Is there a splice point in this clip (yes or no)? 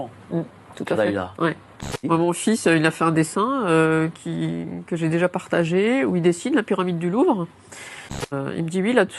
yes